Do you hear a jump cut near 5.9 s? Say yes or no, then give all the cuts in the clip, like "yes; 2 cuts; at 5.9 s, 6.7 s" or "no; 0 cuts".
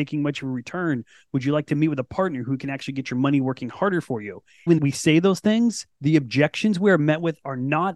yes; 2 cuts; at 4.7 s, 5.9 s